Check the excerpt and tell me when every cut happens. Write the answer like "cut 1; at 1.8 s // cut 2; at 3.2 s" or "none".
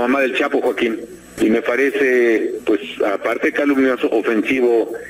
cut 1; at 1.2 s